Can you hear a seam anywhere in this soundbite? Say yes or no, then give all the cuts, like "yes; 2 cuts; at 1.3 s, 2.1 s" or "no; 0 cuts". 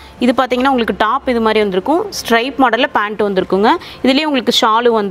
no; 0 cuts